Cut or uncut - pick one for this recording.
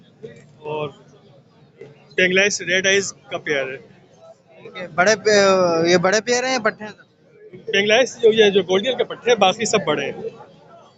uncut